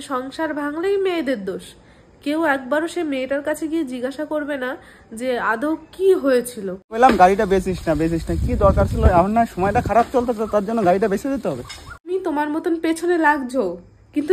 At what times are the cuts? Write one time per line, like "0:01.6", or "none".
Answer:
0:06.9
0:12.1